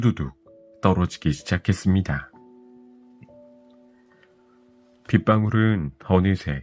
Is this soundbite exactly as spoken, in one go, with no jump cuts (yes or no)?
yes